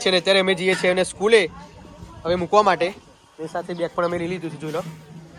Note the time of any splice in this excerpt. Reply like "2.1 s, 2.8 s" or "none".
none

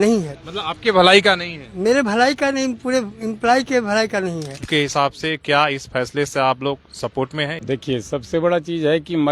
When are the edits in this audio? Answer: 4.7 s, 7.6 s

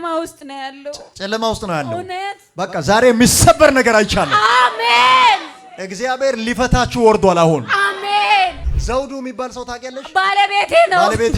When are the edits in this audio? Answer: 2.4 s, 8.7 s

